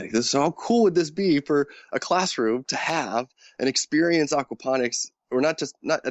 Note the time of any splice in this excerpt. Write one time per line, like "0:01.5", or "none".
none